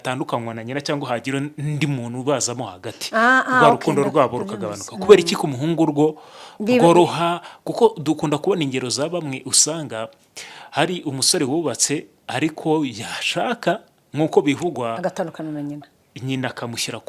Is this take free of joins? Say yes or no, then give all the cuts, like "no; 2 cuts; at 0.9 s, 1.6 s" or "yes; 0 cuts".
yes; 0 cuts